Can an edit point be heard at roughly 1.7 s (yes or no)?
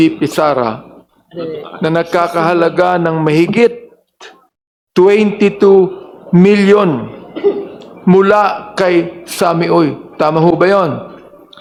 no